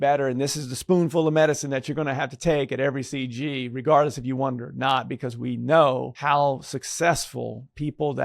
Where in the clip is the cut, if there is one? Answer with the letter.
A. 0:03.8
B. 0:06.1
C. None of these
B